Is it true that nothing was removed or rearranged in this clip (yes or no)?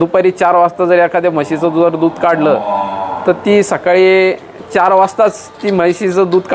yes